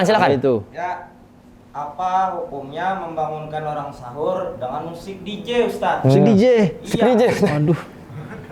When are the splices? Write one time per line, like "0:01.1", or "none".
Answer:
none

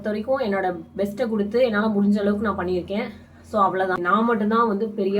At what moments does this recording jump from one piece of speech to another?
0:04.0

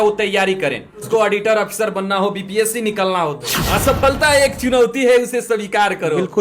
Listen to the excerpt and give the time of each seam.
0:01.1
0:03.5

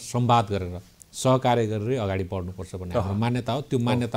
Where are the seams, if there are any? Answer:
none

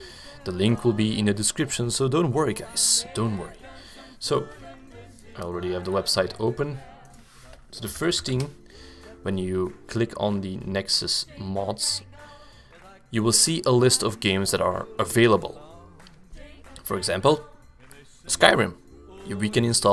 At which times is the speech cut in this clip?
none

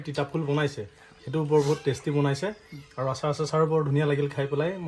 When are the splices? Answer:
none

